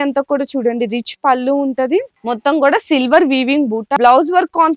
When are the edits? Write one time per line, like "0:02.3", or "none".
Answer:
0:02.1
0:04.0